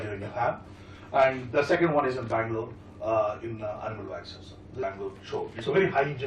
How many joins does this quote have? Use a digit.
1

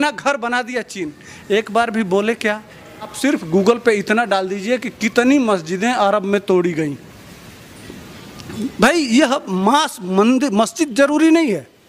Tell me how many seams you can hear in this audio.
1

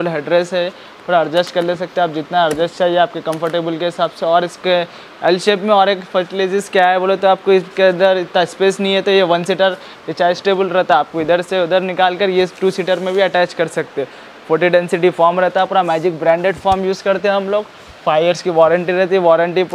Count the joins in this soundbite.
0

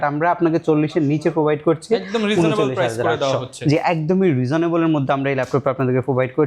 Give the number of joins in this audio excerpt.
0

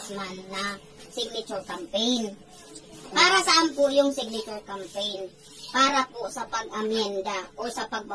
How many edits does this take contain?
0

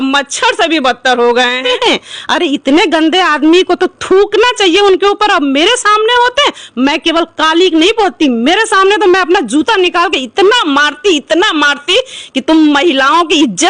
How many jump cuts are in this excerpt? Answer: 1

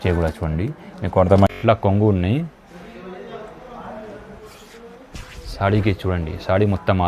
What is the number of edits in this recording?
1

